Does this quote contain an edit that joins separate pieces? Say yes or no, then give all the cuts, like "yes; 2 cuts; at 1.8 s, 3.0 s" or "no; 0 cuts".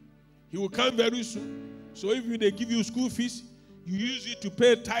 no; 0 cuts